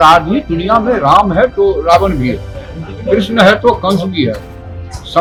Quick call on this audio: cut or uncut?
uncut